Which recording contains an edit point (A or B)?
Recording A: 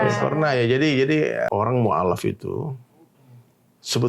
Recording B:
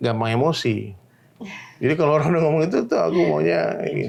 A